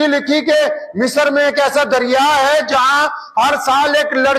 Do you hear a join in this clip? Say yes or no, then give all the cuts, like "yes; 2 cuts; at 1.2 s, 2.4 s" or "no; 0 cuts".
no; 0 cuts